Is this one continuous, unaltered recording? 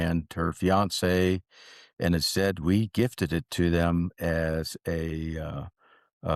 yes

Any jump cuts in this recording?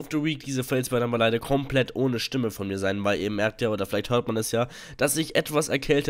no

